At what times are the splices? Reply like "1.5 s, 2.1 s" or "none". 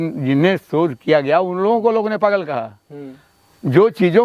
none